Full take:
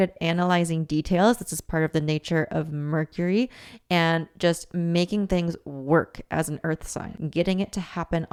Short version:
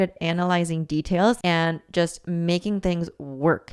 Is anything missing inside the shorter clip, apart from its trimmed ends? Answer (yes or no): yes